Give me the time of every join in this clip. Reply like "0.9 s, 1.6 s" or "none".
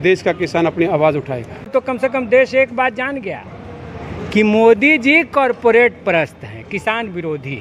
1.6 s